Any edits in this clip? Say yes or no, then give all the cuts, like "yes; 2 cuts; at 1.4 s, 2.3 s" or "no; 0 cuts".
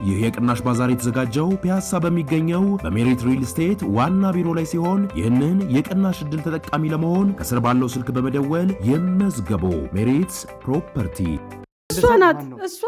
yes; 1 cut; at 11.9 s